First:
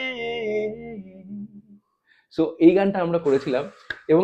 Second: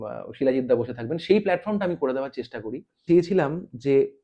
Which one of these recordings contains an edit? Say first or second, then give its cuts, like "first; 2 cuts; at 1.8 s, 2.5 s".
second; 1 cut; at 3.0 s